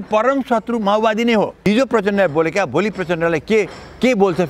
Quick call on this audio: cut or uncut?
cut